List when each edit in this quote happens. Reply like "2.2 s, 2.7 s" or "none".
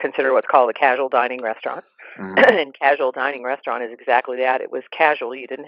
none